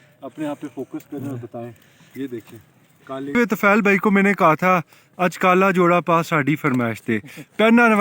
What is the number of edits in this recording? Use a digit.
1